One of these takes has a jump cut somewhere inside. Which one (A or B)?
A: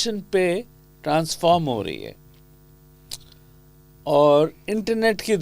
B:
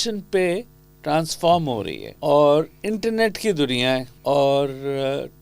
B